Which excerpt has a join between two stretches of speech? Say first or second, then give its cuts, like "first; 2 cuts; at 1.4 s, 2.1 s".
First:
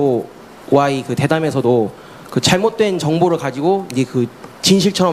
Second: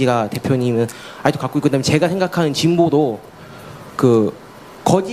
second; 1 cut; at 3.8 s